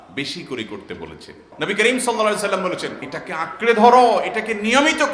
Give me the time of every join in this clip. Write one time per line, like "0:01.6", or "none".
0:01.4
0:03.1